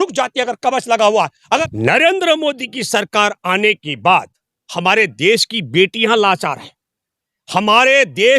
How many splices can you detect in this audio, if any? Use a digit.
1